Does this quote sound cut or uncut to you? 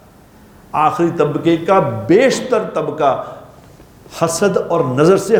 uncut